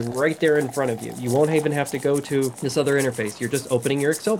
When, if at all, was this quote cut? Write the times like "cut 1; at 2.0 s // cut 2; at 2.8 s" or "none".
cut 1; at 2.6 s